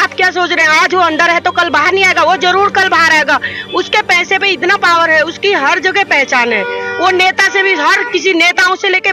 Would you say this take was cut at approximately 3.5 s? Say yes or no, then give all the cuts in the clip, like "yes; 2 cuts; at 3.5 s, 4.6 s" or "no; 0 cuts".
no; 0 cuts